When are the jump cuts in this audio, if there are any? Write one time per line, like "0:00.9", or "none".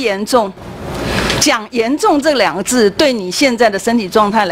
none

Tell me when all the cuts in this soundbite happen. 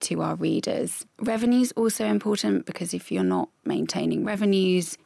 0:01.0

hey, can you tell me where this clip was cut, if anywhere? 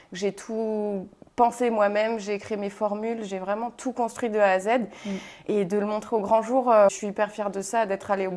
0:07.0

